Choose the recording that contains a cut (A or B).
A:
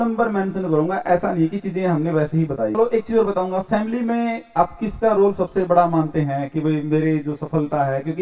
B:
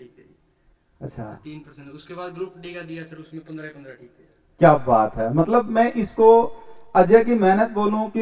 A